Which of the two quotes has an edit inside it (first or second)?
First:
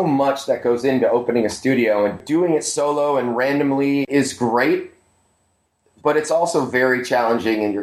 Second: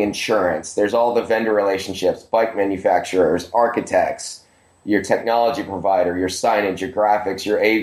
first